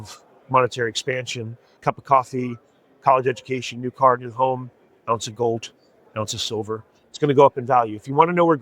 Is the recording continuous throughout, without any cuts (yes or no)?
no